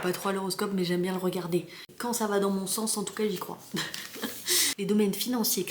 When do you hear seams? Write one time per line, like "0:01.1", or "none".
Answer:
0:01.9
0:04.7